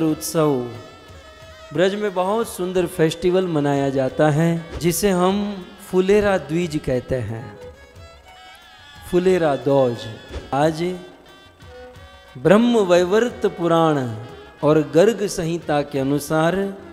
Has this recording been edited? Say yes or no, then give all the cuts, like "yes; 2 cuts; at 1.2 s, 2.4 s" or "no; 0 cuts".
yes; 2 cuts; at 4.7 s, 10.5 s